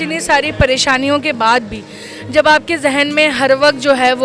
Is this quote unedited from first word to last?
yes; 0 cuts

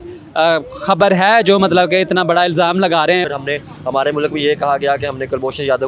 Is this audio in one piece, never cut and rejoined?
no; 1 cut; at 3.2 s

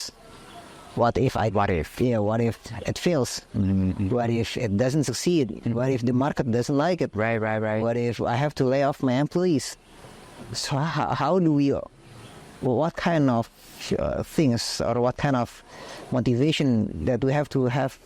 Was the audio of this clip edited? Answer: no; 0 cuts

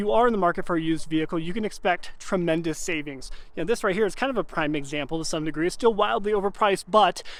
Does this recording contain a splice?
no; 0 cuts

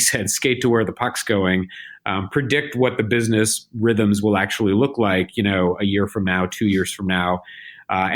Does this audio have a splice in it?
no; 0 cuts

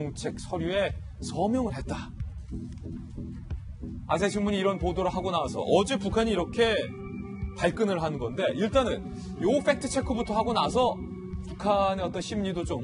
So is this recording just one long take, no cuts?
yes; 0 cuts

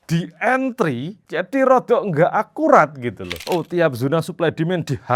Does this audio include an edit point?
yes; 1 cut; at 3.4 s

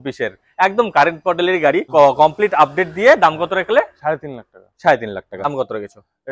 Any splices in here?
yes; 2 cuts; at 1.8 s, 5.5 s

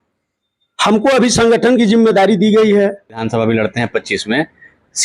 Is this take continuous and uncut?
no; 1 cut; at 3.2 s

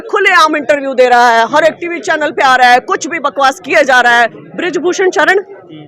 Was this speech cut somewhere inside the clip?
yes; 1 cut; at 4.4 s

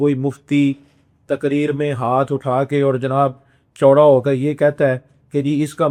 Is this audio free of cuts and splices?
yes; 0 cuts

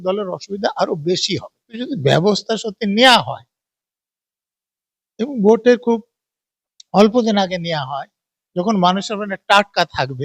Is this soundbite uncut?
no; 1 cut; at 1.8 s

